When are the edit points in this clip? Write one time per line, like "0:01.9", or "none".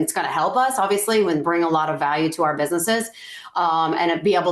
none